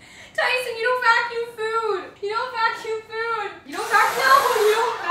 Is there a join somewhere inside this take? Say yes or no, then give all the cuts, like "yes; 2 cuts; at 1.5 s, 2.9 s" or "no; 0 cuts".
yes; 2 cuts; at 2.1 s, 3.6 s